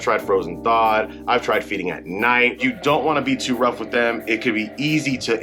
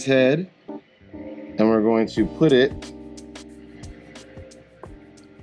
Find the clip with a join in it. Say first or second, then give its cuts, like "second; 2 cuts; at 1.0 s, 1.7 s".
first; 1 cut; at 2.6 s